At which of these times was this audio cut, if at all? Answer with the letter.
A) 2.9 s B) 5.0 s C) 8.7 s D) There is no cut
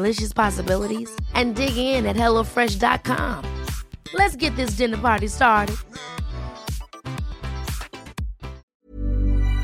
C